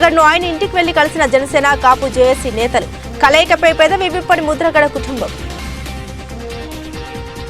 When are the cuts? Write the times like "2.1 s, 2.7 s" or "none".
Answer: 5.5 s